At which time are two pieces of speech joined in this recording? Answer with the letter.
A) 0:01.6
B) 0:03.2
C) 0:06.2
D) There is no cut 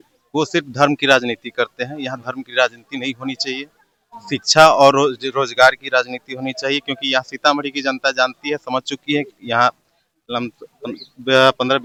D